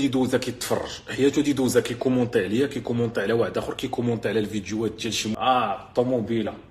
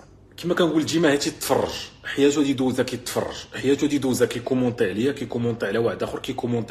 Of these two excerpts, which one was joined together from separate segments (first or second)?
first